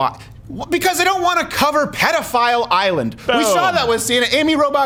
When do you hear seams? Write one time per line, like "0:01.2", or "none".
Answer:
none